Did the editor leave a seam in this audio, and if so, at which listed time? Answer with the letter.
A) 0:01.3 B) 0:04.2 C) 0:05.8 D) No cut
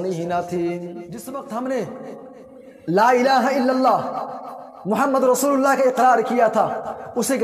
A